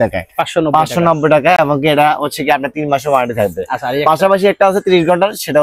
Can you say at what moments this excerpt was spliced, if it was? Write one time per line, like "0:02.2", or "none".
none